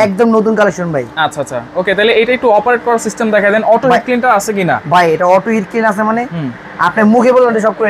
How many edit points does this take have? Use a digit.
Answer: 0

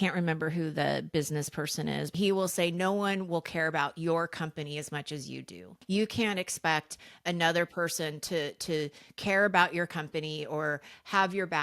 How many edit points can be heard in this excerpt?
2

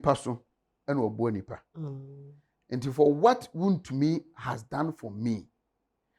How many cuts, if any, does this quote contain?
0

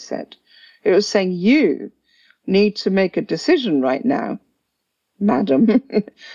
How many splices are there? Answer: 0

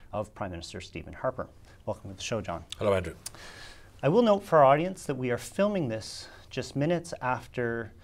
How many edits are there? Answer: 0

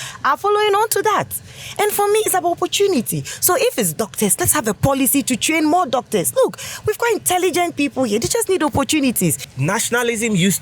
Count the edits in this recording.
1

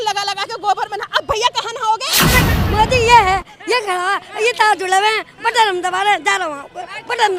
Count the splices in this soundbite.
1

